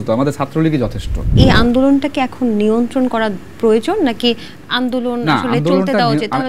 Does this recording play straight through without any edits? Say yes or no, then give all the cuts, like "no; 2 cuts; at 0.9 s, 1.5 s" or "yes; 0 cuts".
no; 1 cut; at 1.3 s